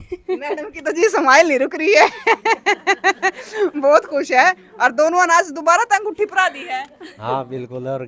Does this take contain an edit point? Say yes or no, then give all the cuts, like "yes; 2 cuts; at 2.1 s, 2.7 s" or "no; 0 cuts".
no; 0 cuts